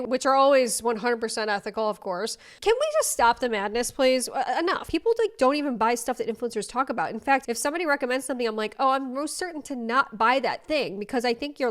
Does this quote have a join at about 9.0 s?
no; 2 cuts; at 4.8 s, 7.4 s

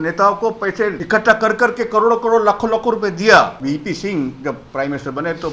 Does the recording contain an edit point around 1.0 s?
yes; 2 cuts; at 1.0 s, 3.6 s

